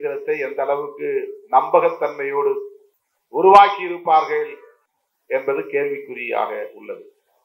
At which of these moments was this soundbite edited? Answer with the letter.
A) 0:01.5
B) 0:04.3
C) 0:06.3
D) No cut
D